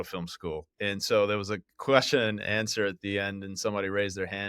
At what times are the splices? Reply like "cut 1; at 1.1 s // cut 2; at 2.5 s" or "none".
none